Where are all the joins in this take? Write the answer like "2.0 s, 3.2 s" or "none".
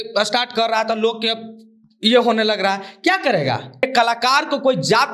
3.8 s